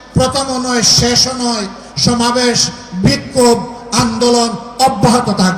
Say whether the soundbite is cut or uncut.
uncut